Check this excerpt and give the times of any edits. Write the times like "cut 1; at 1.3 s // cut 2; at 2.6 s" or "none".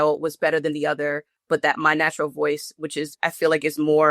cut 1; at 3.1 s